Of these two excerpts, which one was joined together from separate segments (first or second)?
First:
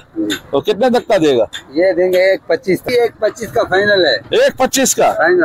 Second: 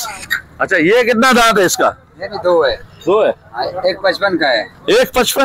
first